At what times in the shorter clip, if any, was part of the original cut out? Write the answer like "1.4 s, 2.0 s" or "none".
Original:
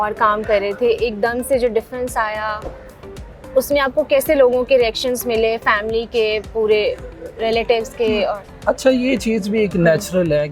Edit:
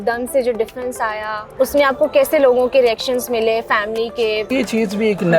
1.4 s, 4.5 s